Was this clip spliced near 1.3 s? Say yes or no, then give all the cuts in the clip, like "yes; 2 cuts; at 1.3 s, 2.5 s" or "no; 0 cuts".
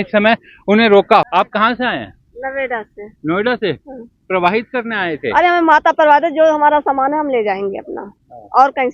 yes; 1 cut; at 1.3 s